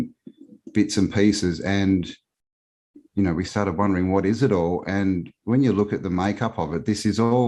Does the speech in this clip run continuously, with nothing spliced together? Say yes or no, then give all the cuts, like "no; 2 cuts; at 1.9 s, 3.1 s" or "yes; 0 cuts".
yes; 0 cuts